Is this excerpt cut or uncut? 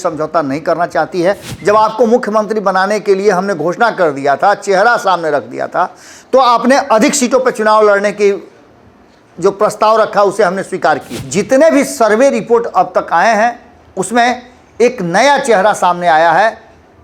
cut